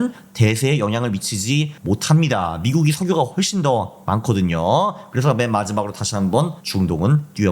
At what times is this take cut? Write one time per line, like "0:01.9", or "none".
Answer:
0:01.8
0:06.6